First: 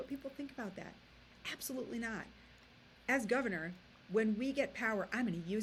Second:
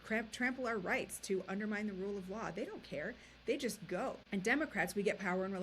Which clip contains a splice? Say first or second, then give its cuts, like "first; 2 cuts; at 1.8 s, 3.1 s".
second; 1 cut; at 4.2 s